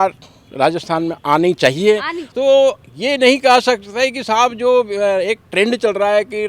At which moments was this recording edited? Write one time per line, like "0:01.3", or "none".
0:02.2